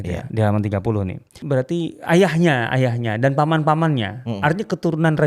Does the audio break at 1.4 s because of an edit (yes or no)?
yes